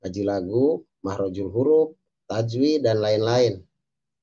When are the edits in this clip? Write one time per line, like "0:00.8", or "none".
0:00.9